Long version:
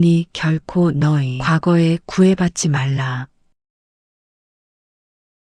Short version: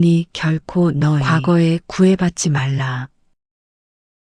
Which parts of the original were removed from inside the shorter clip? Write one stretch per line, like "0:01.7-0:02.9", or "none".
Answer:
0:01.2-0:01.4